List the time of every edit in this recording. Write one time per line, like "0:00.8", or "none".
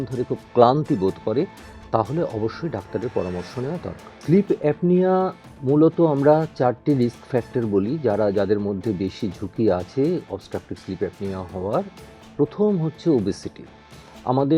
0:04.1

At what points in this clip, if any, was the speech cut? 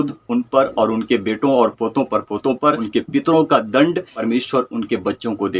0:02.8
0:04.1

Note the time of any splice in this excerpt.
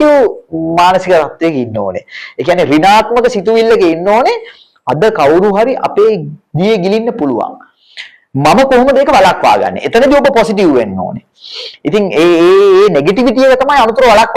none

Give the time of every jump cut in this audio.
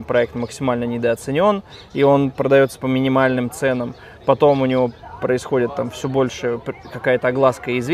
none

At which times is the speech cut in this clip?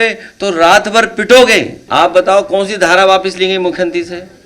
0:01.8

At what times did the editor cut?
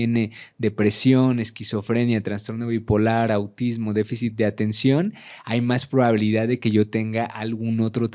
none

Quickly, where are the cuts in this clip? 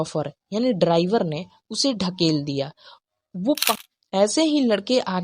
0:03.8

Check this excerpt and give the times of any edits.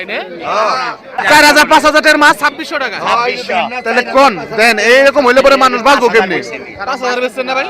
0:01.2

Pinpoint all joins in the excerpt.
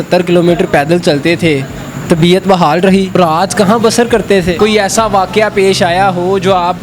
0:03.2
0:04.6

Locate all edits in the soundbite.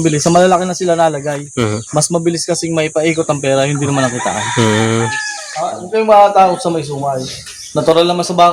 0:05.8

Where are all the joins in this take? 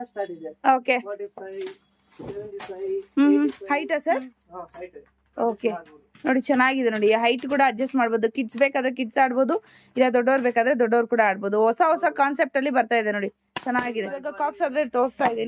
0:03.8
0:14.3

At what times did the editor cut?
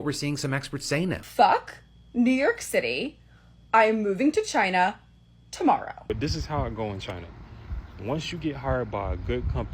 0:01.2
0:06.1

